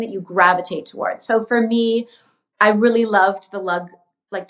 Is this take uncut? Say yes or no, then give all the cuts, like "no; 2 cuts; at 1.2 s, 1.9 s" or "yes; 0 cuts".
yes; 0 cuts